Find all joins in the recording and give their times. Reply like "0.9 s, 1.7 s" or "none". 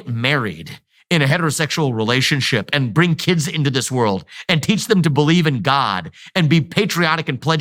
none